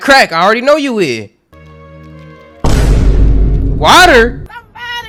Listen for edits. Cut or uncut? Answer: uncut